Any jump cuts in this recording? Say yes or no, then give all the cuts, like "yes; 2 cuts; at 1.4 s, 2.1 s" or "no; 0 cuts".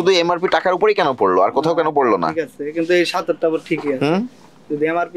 no; 0 cuts